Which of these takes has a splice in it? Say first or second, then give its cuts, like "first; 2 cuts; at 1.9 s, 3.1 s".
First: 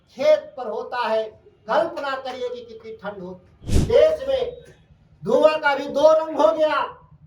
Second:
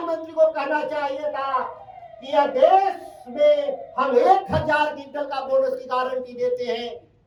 first; 1 cut; at 3.7 s